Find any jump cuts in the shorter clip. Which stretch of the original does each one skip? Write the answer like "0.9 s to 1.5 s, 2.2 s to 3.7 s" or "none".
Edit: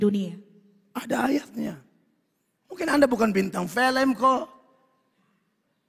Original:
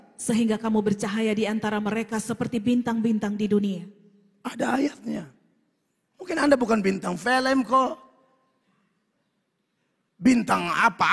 none